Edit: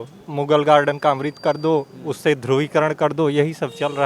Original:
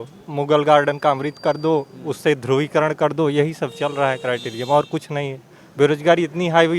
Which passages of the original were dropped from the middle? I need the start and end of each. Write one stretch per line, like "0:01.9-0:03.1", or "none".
none